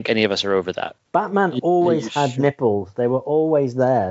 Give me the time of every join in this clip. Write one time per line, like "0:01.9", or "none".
0:00.9

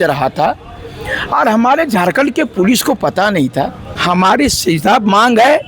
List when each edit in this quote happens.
0:03.9

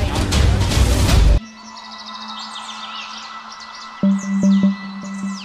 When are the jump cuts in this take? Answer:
0:01.4

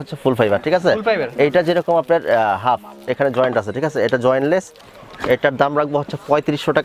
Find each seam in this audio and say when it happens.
0:04.9

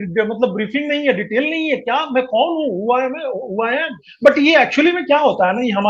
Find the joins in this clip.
0:04.0

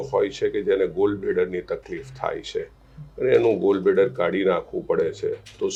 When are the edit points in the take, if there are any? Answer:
none

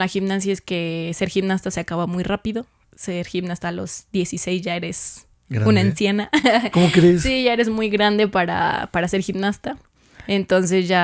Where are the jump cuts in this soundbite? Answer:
none

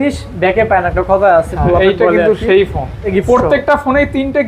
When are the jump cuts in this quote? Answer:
0:03.1

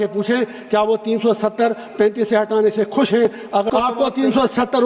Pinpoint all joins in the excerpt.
0:03.7

